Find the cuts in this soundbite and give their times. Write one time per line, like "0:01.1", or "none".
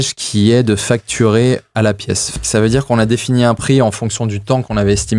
0:02.4